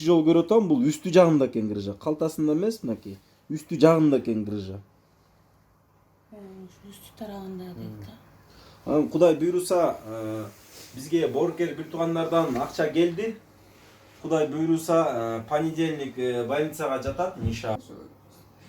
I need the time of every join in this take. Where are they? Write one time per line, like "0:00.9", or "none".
0:17.8